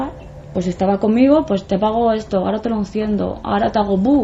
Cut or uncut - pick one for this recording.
uncut